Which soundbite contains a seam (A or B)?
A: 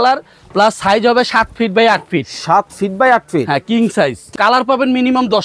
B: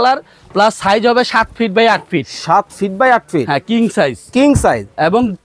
A